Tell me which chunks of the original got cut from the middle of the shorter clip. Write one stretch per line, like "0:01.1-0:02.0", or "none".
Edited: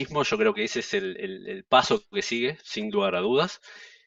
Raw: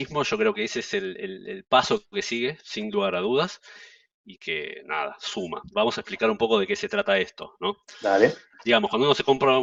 none